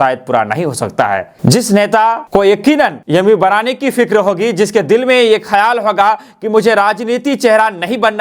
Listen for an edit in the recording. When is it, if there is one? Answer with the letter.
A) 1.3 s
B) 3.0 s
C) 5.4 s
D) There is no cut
A